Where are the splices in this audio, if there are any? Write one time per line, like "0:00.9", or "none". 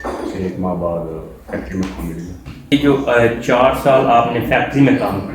0:02.7